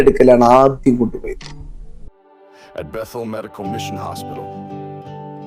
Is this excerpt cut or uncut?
cut